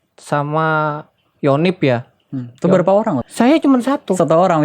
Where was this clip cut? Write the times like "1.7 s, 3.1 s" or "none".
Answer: 3.2 s